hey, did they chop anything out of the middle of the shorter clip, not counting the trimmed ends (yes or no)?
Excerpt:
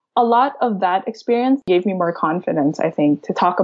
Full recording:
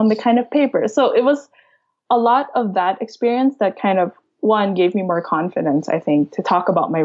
yes